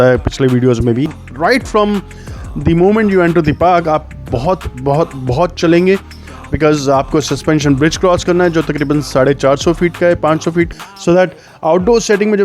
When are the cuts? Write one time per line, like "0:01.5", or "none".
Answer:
0:01.2
0:10.7